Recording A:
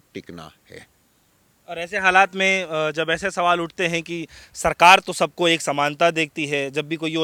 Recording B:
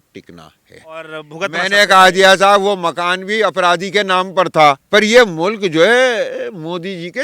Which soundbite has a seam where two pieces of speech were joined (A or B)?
B